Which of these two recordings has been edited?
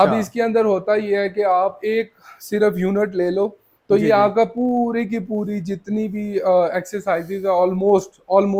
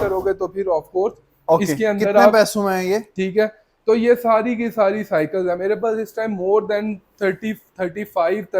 second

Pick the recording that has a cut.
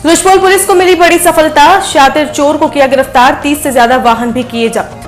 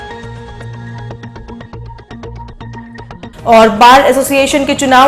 second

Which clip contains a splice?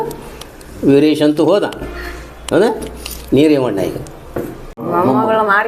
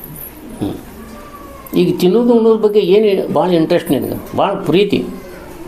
first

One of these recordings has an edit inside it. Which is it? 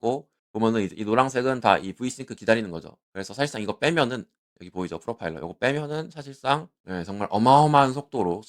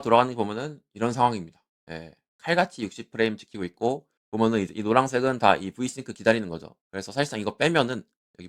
first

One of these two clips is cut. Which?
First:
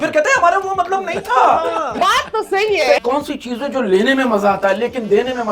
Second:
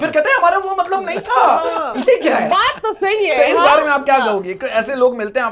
first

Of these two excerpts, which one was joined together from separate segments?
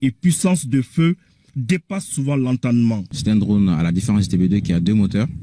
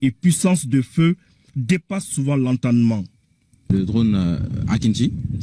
first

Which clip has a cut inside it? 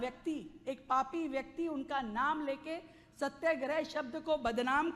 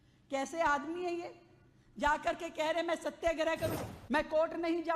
second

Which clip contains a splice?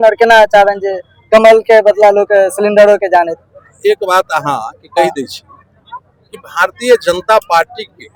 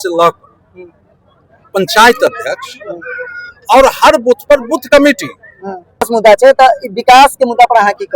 second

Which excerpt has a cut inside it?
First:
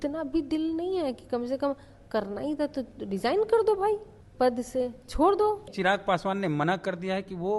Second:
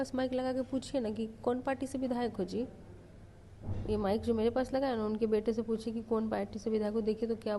first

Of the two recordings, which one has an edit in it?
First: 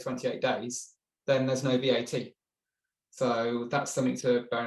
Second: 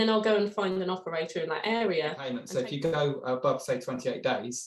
second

